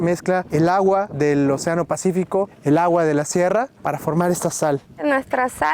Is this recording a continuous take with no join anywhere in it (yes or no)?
no